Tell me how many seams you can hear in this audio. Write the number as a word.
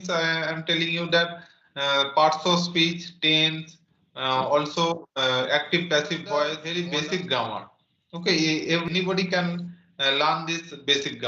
two